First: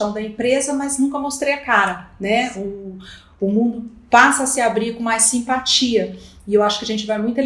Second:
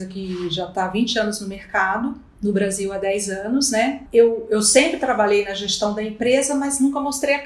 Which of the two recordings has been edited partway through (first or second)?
second